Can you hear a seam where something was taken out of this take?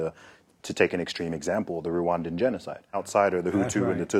yes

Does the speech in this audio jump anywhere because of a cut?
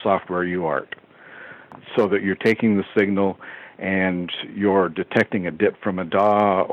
yes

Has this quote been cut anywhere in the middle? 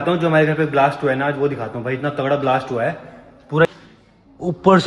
yes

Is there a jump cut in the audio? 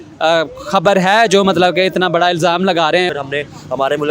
yes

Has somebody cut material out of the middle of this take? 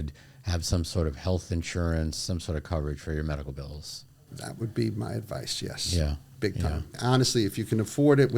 yes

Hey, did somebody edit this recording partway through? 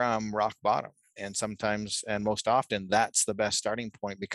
no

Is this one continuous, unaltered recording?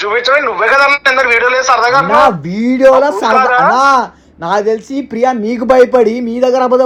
yes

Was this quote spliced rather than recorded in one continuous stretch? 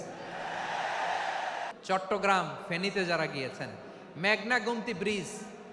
yes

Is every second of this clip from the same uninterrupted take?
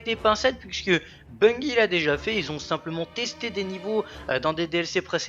no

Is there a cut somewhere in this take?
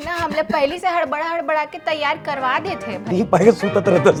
no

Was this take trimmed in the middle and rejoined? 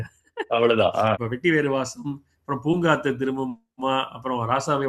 yes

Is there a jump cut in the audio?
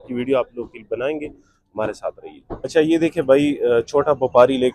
no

